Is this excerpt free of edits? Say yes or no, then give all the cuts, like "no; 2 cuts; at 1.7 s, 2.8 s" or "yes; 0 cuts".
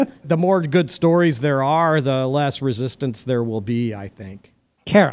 yes; 0 cuts